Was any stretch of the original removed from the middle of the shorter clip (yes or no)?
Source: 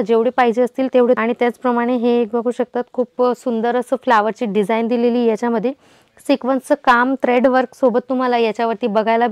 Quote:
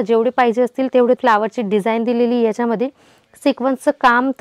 yes